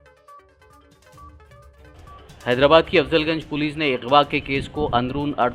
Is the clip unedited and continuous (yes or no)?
yes